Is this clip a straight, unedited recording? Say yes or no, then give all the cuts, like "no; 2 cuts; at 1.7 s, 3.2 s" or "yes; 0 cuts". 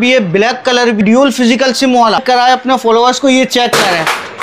no; 2 cuts; at 1.0 s, 2.2 s